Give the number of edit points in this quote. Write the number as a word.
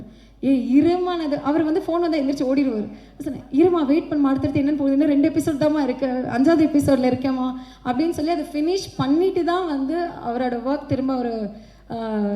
zero